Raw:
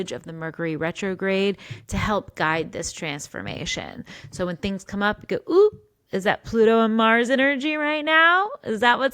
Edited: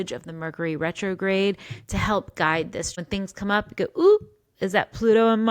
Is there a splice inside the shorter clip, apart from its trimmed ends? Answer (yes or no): yes